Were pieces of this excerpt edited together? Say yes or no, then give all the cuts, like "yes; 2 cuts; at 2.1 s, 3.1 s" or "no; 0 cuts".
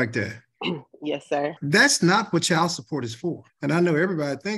yes; 2 cuts; at 1.6 s, 3.5 s